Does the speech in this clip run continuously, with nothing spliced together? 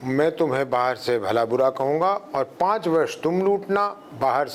yes; 0 cuts

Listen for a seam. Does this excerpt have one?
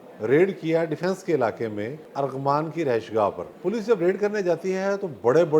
yes; 2 cuts; at 2.0 s, 3.5 s

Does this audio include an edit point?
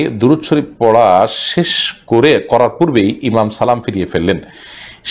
no; 0 cuts

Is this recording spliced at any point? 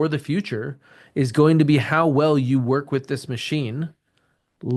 no; 0 cuts

